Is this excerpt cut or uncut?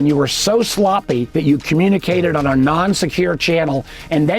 cut